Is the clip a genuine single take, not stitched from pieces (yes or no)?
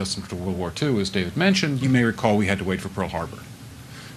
no